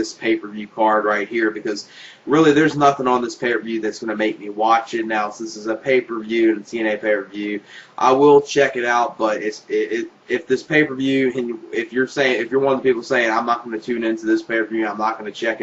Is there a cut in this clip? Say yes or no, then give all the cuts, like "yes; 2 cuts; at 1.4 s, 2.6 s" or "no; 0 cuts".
yes; 1 cut; at 6.3 s